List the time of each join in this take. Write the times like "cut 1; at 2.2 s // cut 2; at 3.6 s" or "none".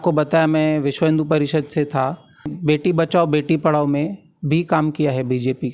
cut 1; at 2.5 s